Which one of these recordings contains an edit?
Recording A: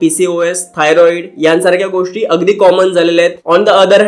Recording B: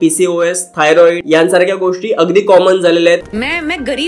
B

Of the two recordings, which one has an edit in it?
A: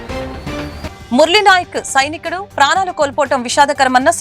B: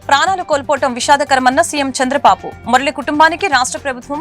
A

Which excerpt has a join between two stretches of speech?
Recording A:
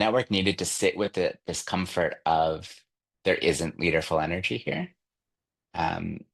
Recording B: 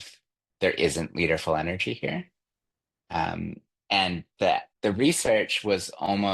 B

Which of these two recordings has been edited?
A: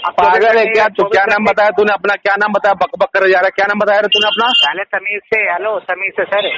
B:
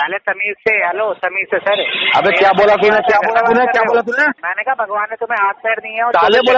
B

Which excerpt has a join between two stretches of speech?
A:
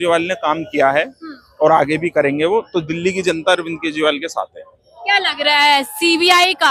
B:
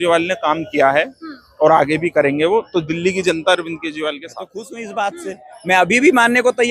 B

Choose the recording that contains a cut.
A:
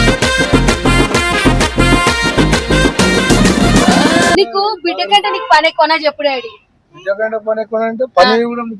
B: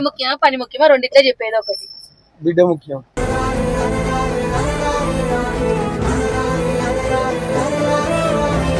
A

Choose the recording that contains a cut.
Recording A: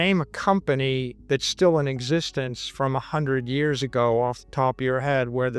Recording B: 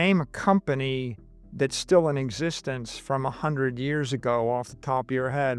A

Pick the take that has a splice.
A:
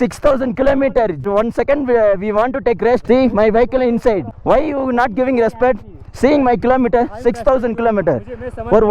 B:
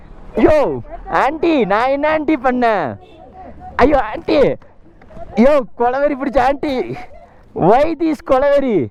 A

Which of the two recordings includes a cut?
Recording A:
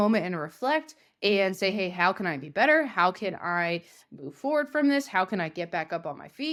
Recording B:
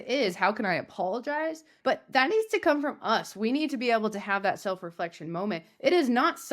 B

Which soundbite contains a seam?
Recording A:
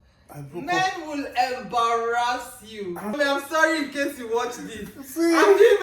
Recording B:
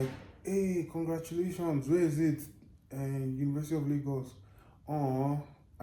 A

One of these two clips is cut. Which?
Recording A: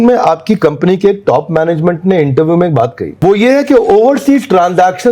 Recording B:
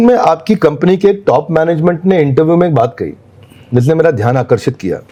A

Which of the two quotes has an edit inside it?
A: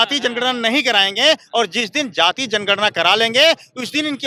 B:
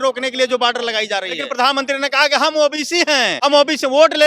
B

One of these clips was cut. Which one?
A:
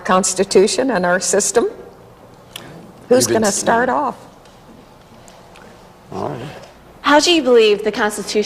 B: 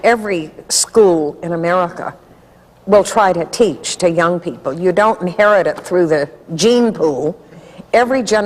B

